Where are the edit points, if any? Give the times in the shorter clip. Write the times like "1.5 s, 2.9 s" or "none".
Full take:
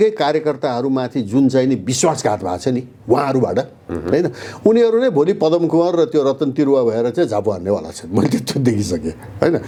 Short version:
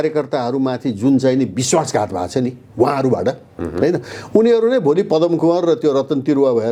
none

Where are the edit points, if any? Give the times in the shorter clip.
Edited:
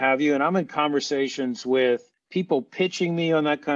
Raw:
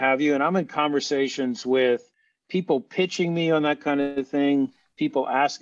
2.2 s

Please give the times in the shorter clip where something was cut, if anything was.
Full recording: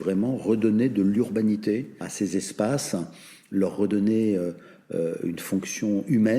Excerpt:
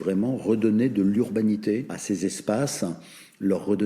1.9 s

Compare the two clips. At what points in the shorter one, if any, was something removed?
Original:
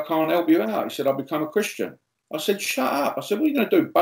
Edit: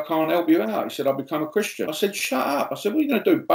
1.9 s

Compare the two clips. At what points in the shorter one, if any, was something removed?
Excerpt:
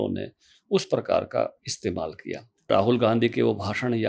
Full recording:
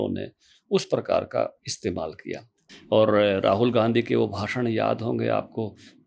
2.7 s

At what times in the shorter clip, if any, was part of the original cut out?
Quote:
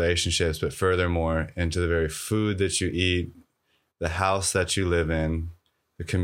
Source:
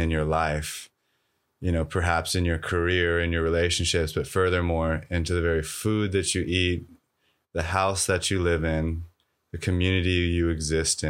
none

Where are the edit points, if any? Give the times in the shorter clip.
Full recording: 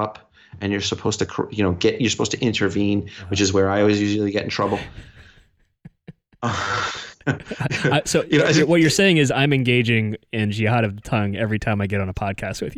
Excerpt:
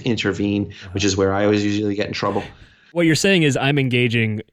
3.0 s

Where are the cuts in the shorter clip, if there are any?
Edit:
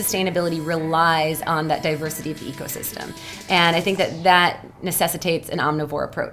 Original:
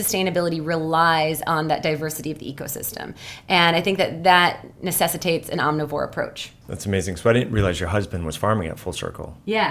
none

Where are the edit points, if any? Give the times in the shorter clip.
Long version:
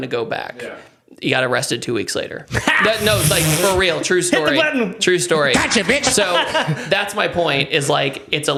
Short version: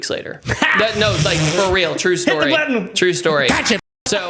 none

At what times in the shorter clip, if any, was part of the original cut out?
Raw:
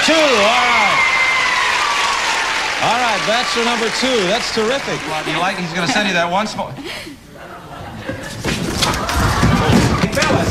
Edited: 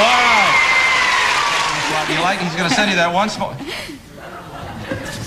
1.9 s

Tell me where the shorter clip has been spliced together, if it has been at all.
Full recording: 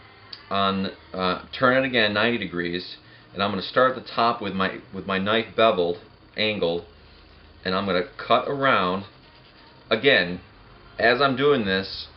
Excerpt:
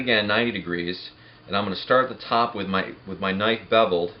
none

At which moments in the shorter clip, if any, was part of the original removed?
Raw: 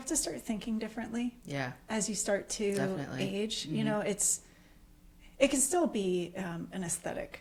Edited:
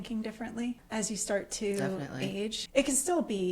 0.8 s, 2.6 s

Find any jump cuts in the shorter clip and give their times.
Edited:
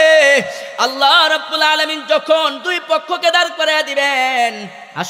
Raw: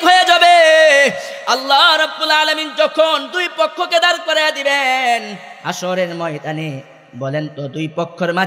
none

